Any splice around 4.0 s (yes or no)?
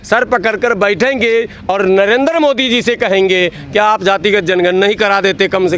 no